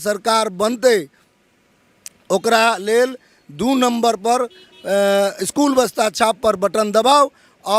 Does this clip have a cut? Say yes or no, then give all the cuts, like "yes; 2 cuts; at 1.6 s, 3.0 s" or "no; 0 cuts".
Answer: no; 0 cuts